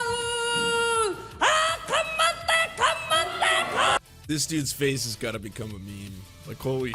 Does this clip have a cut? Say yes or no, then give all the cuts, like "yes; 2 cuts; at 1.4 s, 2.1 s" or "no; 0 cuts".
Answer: yes; 1 cut; at 4.0 s